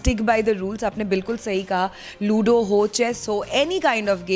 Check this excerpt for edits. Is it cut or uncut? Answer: uncut